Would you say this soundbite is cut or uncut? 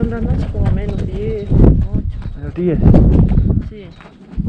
uncut